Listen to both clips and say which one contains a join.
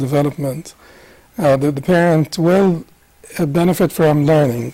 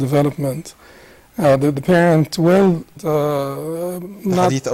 first; 1 cut; at 3.0 s

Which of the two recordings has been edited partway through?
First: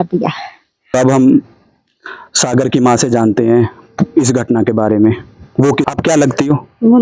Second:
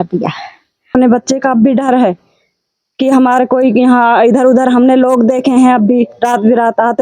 second; 1 cut; at 0.9 s

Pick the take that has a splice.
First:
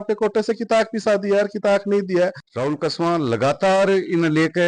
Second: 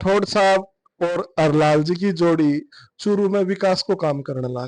first; 1 cut; at 2.5 s

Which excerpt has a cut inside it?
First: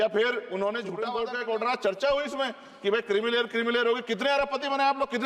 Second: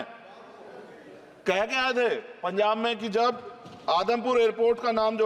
first; 1 cut; at 1.0 s

